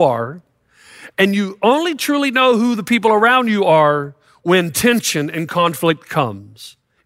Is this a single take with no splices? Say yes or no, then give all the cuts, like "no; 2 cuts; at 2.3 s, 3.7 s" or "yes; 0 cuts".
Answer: yes; 0 cuts